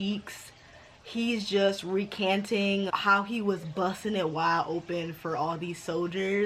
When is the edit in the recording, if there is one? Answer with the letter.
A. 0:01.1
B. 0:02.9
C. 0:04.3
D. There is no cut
B